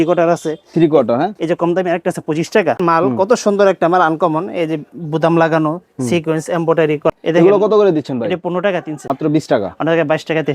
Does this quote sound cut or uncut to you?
cut